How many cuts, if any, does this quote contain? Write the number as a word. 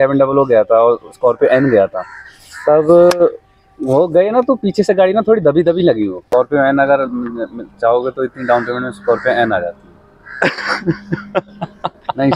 one